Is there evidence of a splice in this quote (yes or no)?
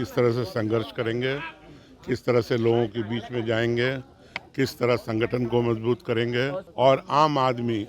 yes